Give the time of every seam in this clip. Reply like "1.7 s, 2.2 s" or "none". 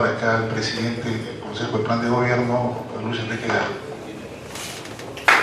none